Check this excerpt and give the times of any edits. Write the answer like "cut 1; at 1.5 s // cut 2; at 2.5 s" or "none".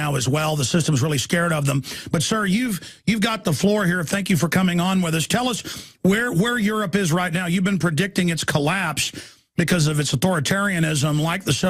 none